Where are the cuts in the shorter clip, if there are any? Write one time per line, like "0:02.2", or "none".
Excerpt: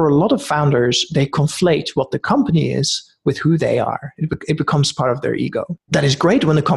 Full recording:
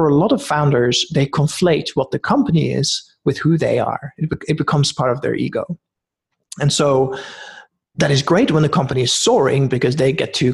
0:05.8